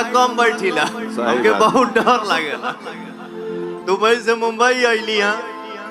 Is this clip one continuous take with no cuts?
no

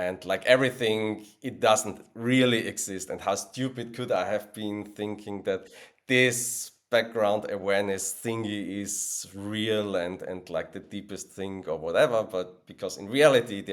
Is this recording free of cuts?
yes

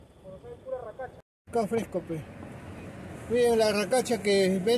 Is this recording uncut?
no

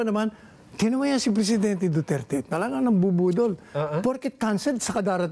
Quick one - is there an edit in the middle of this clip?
no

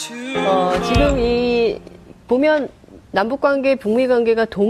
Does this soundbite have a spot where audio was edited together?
no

